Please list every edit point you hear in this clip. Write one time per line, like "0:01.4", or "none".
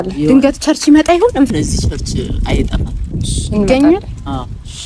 0:01.5